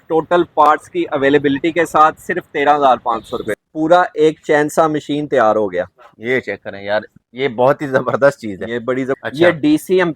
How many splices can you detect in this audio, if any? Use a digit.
2